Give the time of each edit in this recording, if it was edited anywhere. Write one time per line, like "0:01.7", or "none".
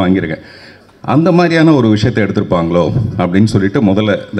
none